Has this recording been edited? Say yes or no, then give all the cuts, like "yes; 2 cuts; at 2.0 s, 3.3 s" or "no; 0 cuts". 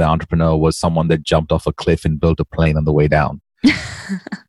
no; 0 cuts